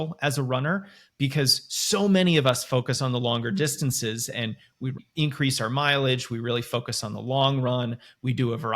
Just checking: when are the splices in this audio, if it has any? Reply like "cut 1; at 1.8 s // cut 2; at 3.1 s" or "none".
cut 1; at 5.0 s